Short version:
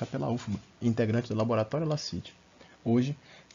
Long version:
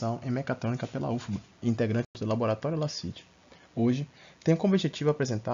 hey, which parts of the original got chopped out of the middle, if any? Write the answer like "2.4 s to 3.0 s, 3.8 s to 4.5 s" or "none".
2.1 s to 2.2 s